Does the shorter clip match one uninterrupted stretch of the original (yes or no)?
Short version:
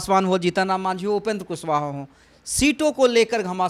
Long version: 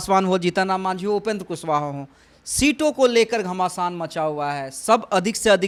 yes